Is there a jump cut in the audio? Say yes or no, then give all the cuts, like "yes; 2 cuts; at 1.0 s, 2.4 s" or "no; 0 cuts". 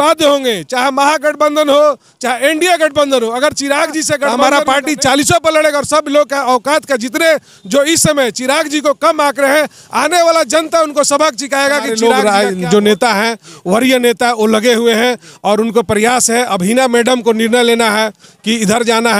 yes; 2 cuts; at 4.3 s, 11.9 s